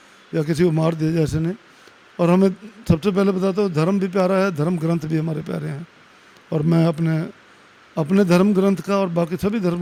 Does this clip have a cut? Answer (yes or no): no